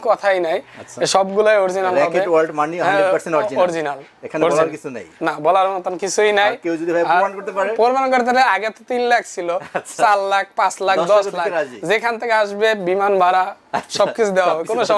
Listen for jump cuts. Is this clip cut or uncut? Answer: uncut